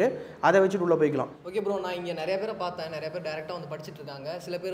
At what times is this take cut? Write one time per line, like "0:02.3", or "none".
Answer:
0:01.4